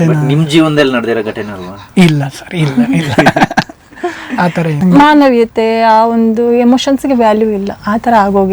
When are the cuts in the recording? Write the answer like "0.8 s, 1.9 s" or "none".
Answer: 4.8 s